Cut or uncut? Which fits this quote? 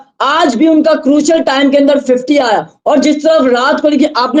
uncut